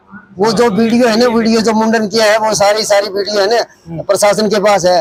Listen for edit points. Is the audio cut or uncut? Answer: uncut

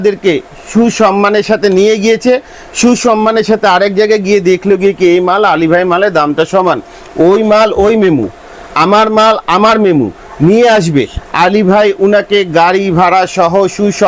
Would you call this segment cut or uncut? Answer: uncut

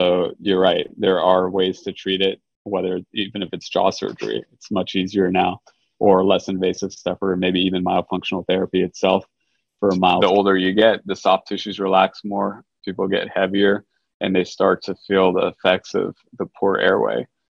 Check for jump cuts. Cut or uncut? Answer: cut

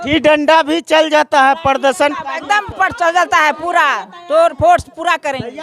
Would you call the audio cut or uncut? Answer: uncut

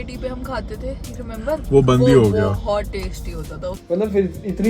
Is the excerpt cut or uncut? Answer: cut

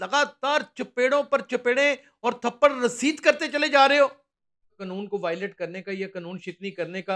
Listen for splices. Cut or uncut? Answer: cut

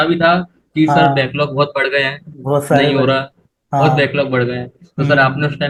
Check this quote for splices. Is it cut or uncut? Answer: uncut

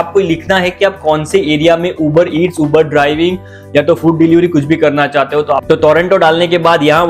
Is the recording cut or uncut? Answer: cut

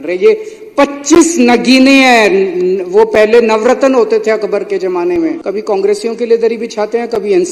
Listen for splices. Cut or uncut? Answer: cut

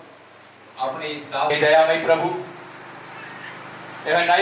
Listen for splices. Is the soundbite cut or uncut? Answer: cut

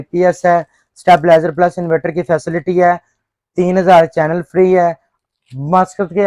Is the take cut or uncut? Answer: uncut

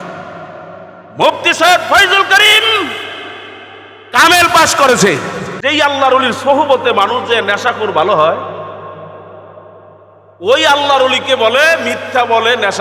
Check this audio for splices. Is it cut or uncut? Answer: cut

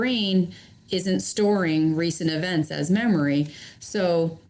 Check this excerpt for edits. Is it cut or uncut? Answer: uncut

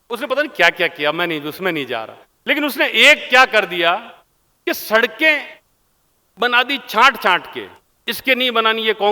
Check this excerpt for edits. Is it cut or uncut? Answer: uncut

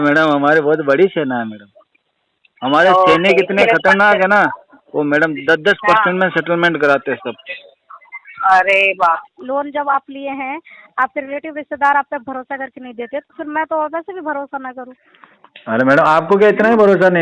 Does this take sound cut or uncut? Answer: cut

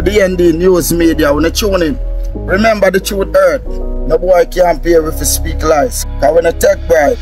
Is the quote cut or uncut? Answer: uncut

